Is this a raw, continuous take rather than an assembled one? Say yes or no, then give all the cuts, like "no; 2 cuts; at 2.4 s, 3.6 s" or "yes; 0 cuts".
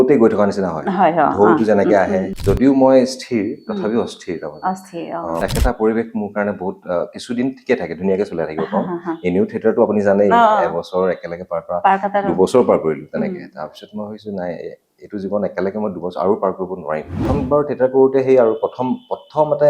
no; 3 cuts; at 2.3 s, 5.4 s, 17.3 s